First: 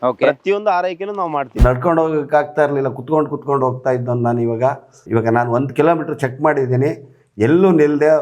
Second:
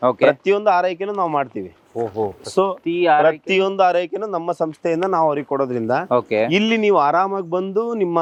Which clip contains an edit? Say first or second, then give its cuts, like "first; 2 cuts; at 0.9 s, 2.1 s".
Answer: first; 1 cut; at 1.6 s